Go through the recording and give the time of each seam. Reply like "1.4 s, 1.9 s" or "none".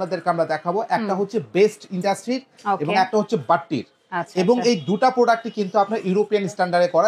none